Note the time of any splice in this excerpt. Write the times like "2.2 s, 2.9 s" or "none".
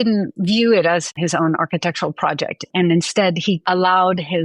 1.1 s